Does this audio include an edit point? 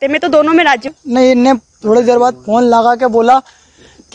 yes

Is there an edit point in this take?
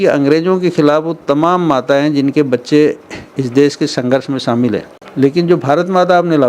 yes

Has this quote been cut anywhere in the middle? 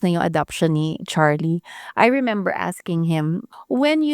yes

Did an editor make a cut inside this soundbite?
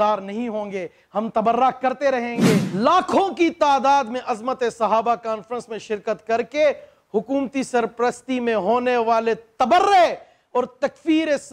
yes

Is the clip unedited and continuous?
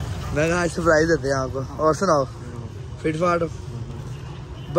yes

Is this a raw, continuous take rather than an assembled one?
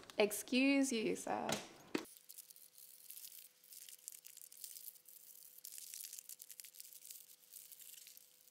yes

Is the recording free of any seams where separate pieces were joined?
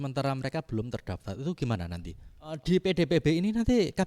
no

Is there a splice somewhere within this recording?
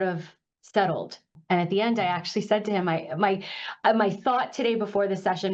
yes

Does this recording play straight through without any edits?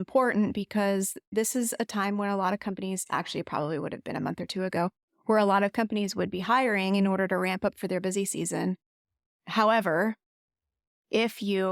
yes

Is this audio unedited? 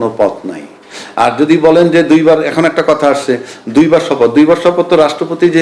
yes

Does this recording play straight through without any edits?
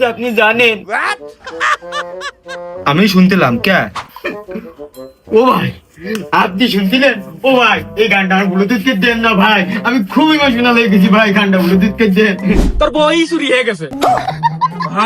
no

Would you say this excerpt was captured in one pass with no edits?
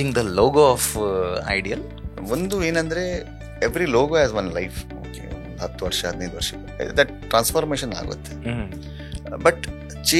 no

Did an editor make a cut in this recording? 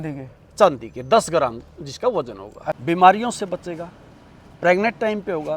yes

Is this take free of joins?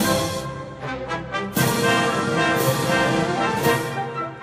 yes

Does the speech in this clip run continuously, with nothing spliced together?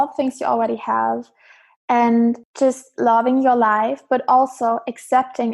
no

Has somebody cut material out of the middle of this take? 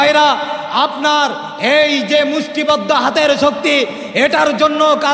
no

